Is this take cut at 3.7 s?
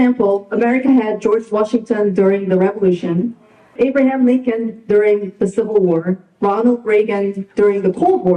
yes; 1 cut; at 3.7 s

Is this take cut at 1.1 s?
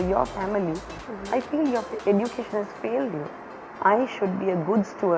no; 1 cut; at 3.7 s

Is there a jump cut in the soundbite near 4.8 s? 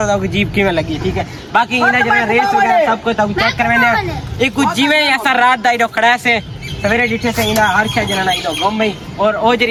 no; 0 cuts

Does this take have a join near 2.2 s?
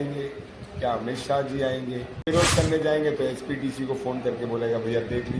yes; 1 cut; at 2.2 s

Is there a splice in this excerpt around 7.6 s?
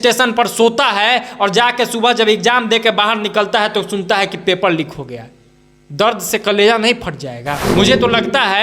yes; 1 cut; at 7.6 s

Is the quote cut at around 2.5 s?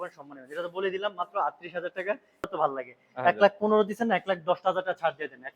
yes; 1 cut; at 2.5 s

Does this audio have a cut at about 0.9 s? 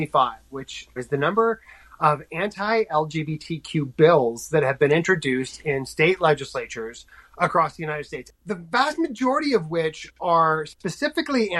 yes; 2 cuts; at 0.9 s, 8.2 s

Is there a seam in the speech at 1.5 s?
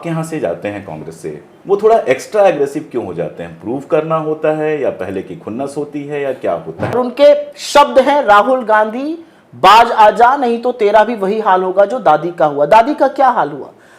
yes; 2 cuts; at 1.5 s, 6.9 s

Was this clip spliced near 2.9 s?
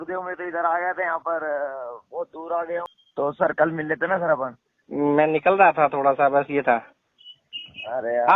yes; 1 cut; at 2.9 s

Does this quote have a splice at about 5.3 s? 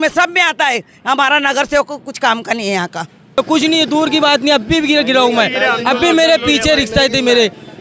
no; 1 cut; at 3.4 s

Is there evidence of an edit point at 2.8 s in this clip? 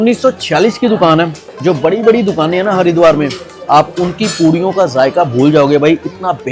no; 1 cut; at 1.4 s

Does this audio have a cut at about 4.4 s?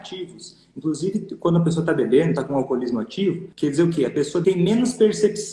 yes; 2 cuts; at 3.5 s, 4.4 s

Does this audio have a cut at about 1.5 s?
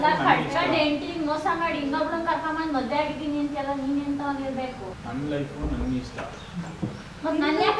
no; 0 cuts

